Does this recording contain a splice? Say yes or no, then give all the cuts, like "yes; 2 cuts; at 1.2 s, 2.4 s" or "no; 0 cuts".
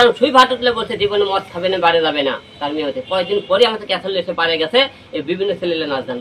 no; 0 cuts